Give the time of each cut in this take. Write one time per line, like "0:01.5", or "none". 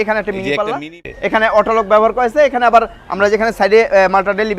0:01.0